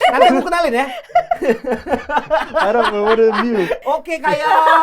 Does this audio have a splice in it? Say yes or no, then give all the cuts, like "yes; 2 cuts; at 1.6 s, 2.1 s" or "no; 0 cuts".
yes; 1 cut; at 3.8 s